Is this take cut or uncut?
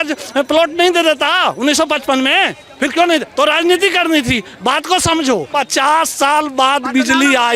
cut